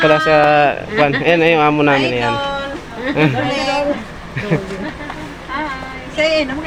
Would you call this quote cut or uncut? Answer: uncut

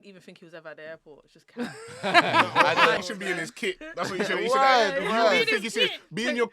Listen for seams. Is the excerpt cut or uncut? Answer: cut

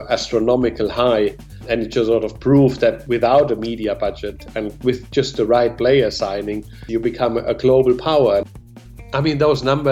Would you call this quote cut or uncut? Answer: cut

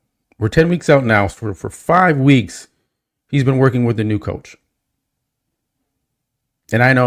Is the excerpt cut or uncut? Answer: uncut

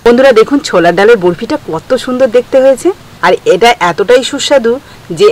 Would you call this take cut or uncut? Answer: cut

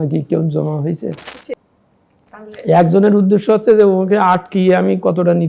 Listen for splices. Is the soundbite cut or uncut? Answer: cut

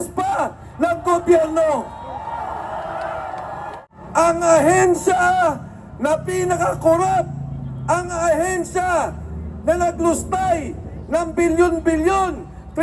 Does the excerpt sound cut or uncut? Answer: cut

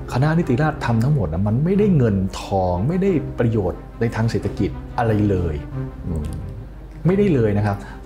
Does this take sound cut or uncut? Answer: uncut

